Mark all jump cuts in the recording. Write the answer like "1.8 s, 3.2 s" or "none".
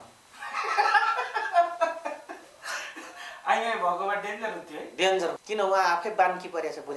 5.4 s